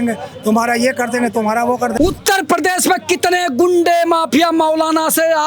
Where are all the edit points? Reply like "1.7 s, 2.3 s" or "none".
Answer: 1.9 s